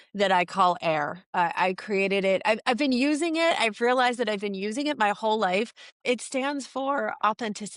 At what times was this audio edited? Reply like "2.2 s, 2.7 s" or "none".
none